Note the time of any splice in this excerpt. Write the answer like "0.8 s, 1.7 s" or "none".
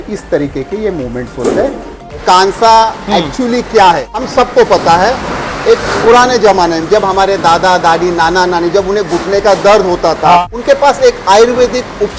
2.1 s, 4.2 s, 10.4 s